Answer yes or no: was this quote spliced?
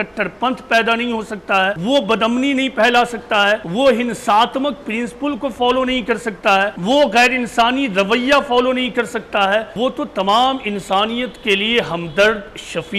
yes